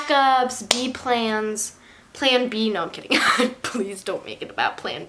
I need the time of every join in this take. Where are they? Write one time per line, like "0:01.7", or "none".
none